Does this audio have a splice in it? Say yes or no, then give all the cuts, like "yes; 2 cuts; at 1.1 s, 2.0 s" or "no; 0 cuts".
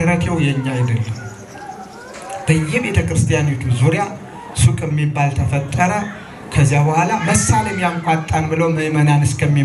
no; 0 cuts